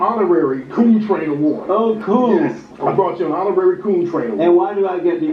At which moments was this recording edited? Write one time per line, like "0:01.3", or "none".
0:00.7
0:02.7